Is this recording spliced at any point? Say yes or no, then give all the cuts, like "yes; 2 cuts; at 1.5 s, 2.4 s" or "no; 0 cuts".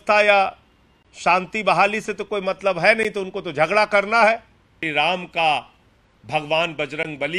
yes; 1 cut; at 4.8 s